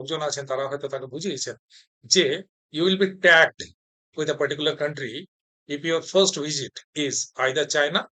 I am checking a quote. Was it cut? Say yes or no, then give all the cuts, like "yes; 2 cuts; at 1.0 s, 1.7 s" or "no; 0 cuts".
no; 0 cuts